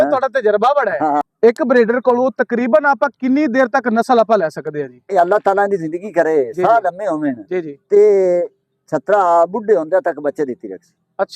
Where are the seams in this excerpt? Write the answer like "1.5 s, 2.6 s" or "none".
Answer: 1.2 s